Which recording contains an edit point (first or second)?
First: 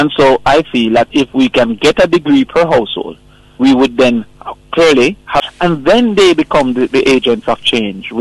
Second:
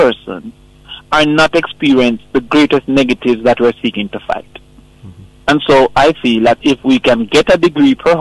first